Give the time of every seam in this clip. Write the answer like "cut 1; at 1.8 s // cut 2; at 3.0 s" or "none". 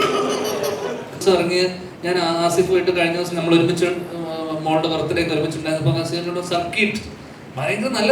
cut 1; at 1.2 s